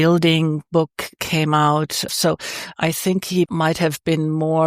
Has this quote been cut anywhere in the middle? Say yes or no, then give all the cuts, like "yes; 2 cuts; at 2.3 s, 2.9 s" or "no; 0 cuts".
yes; 2 cuts; at 2.1 s, 3.5 s